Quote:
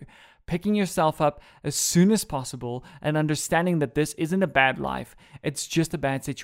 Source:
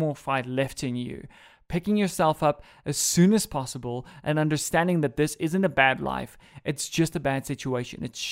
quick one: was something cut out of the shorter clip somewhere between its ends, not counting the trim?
no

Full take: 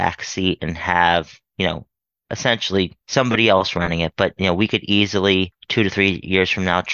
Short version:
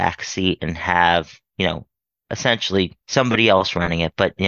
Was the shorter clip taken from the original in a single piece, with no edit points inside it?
yes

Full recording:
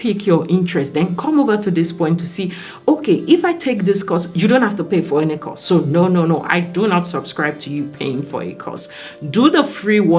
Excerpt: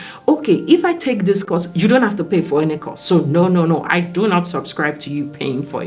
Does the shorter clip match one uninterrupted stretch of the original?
yes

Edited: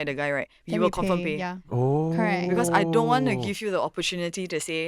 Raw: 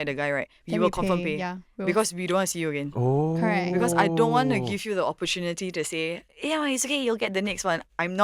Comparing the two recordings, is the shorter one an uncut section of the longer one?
no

